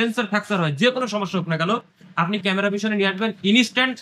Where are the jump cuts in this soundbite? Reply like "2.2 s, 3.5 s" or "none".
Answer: none